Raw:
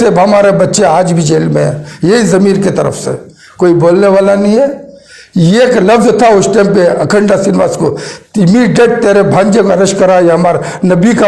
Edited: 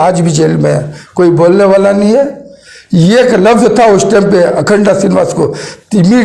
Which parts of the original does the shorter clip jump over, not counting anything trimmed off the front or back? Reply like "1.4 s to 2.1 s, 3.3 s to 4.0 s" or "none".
1.9 s to 3.4 s